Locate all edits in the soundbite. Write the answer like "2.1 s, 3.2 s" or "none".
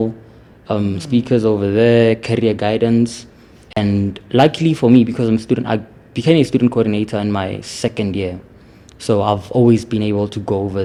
none